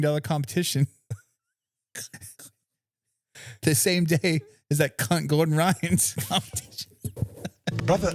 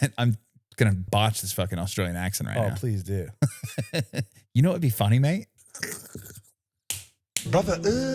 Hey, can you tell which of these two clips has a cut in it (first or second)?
second